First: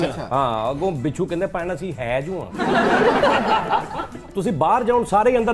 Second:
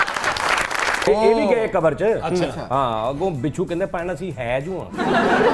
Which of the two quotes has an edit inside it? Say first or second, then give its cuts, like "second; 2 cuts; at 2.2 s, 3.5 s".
second; 1 cut; at 1.1 s